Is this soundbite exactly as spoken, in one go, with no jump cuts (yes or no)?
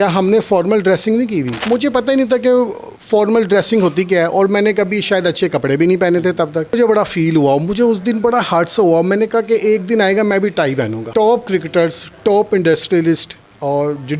no